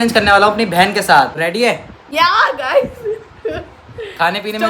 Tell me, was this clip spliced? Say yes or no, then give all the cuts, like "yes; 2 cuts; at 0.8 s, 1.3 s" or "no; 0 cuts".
yes; 1 cut; at 1.4 s